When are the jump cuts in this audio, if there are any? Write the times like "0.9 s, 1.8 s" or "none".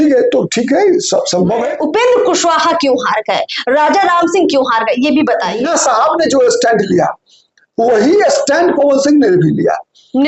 1.7 s, 5.6 s